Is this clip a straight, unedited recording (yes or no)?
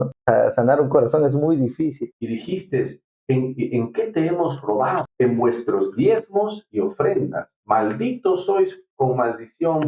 no